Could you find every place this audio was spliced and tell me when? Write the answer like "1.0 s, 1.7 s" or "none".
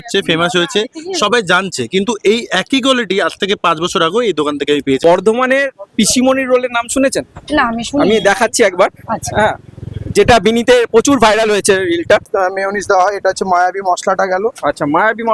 5.0 s, 12.3 s